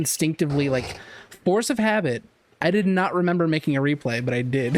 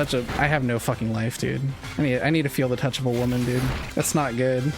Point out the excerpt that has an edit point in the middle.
second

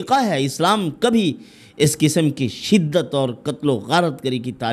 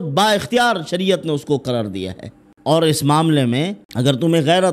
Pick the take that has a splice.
second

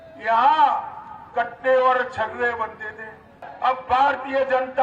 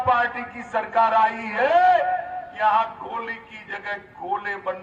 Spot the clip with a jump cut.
first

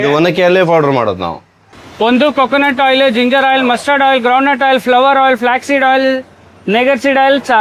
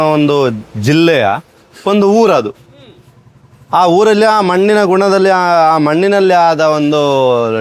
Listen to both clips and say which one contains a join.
first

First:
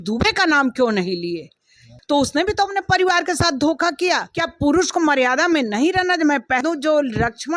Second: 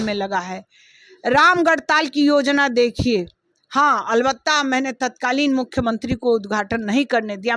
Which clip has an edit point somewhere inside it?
first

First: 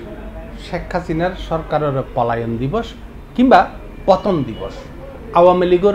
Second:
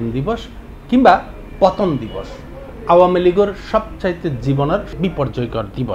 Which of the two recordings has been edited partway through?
second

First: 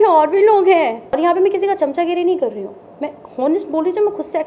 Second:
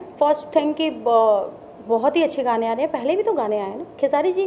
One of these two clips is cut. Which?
first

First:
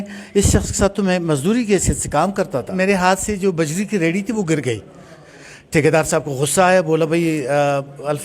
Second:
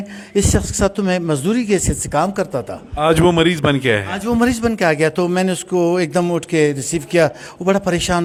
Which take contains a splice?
first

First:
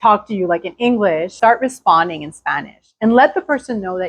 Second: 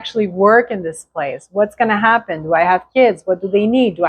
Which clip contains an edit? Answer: first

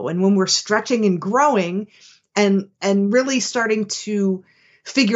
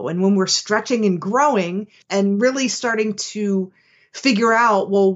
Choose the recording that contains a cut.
second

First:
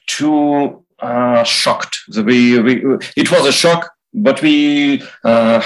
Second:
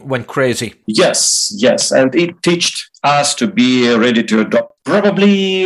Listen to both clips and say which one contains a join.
second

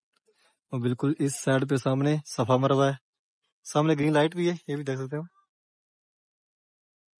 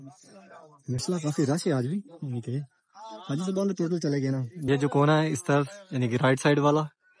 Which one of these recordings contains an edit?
second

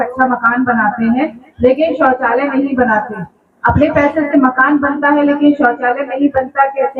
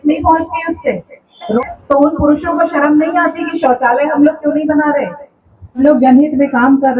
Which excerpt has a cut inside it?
second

